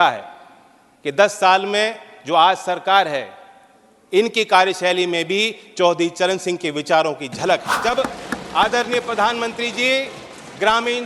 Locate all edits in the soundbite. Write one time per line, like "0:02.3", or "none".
0:07.7